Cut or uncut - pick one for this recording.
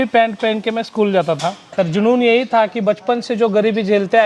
cut